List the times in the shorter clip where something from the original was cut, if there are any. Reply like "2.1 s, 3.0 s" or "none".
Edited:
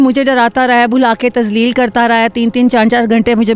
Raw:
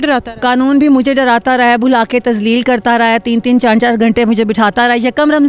none